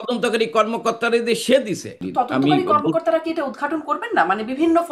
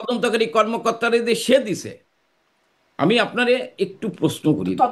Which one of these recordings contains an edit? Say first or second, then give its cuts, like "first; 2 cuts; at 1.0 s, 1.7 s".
first; 1 cut; at 2.0 s